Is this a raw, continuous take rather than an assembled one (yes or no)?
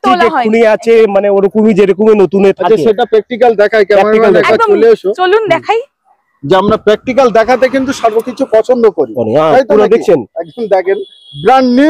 yes